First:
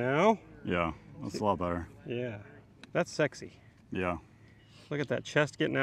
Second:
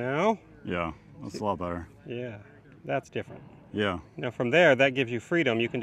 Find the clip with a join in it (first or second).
first